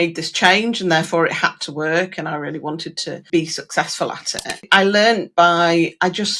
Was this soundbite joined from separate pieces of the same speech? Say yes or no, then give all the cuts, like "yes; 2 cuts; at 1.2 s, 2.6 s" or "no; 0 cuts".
yes; 2 cuts; at 3.3 s, 4.7 s